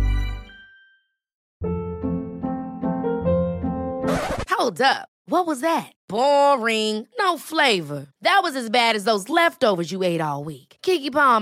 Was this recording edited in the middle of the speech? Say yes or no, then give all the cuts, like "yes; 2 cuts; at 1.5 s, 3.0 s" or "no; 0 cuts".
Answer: yes; 1 cut; at 1.3 s